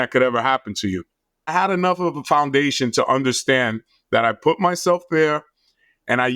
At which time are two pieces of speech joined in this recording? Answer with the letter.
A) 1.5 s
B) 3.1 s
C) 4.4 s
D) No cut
A